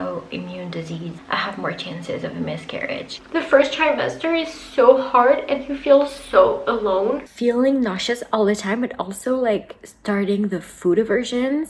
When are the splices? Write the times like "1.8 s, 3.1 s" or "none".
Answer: 1.2 s, 3.1 s, 7.3 s